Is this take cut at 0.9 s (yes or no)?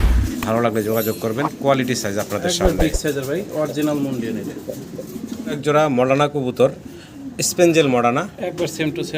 no